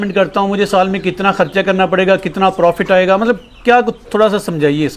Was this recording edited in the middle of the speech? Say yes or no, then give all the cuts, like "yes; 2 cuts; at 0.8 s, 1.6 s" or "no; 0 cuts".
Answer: no; 0 cuts